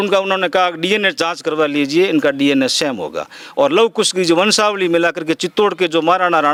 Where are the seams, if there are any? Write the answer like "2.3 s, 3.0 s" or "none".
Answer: none